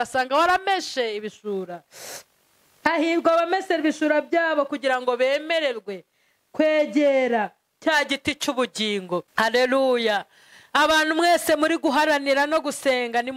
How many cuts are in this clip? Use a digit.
0